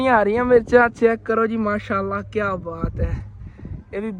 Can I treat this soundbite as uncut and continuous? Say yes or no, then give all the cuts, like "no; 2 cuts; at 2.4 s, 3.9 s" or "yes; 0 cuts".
yes; 0 cuts